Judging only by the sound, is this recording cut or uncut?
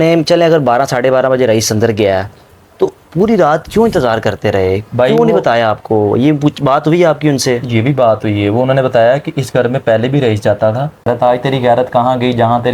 cut